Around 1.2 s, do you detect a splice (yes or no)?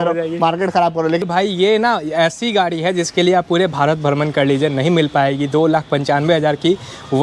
yes